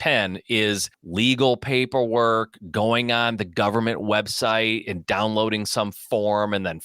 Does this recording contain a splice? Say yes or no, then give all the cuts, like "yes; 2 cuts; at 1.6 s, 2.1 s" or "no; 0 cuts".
yes; 1 cut; at 1.0 s